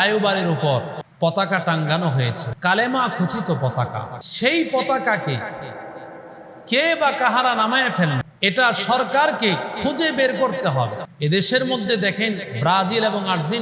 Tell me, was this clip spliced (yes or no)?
yes